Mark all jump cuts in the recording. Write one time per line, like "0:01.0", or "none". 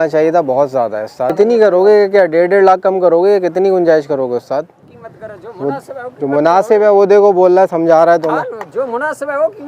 0:01.3
0:04.8